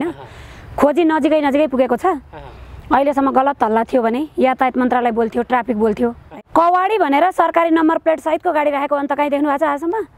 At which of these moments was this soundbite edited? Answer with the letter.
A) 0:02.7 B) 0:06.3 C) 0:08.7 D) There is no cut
B